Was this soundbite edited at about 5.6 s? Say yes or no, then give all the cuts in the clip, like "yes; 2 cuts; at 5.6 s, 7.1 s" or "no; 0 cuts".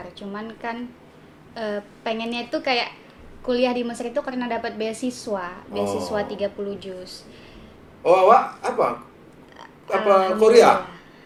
no; 0 cuts